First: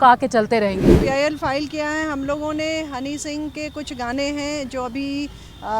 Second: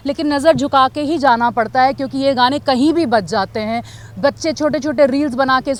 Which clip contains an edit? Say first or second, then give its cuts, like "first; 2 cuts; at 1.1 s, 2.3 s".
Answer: first; 1 cut; at 1.0 s